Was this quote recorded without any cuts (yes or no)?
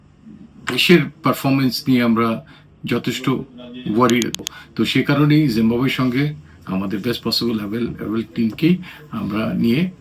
no